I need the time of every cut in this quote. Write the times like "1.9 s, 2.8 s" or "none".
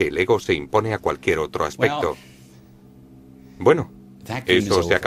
4.0 s